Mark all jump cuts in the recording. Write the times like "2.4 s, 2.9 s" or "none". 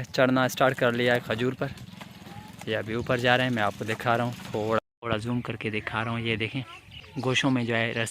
4.8 s, 7.1 s